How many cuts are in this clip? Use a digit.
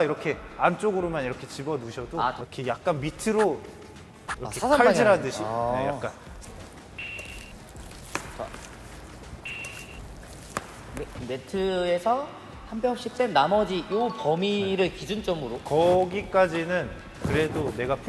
3